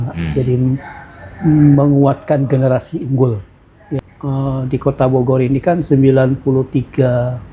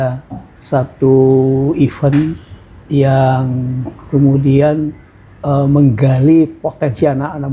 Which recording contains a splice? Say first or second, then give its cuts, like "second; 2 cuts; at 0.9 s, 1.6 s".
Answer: first; 1 cut; at 4.0 s